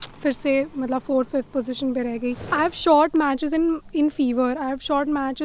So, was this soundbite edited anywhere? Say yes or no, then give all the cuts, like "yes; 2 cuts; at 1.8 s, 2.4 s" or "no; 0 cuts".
yes; 1 cut; at 2.4 s